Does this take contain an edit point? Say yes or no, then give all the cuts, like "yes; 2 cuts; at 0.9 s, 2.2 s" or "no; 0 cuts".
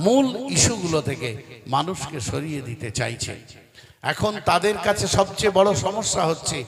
no; 0 cuts